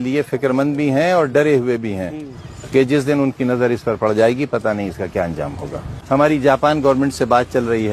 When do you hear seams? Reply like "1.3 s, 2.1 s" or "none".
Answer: 6.0 s